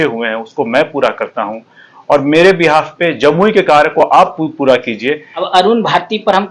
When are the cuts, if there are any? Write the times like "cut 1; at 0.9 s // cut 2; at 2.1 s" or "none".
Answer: cut 1; at 5.3 s